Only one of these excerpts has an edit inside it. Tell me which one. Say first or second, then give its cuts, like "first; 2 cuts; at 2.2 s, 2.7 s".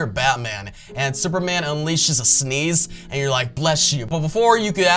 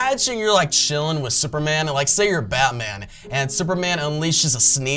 first; 1 cut; at 4.1 s